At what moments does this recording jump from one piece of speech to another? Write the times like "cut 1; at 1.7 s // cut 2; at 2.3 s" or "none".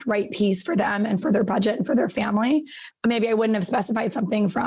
cut 1; at 2.8 s